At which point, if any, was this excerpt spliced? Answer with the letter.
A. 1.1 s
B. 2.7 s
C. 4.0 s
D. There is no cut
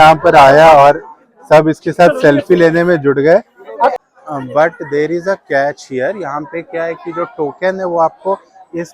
C